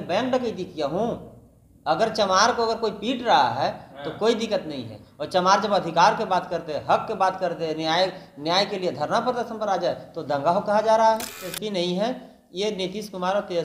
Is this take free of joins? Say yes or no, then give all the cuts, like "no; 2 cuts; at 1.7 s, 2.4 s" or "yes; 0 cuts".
no; 1 cut; at 11.5 s